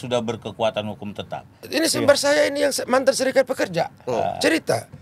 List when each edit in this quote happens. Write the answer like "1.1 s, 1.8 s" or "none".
1.6 s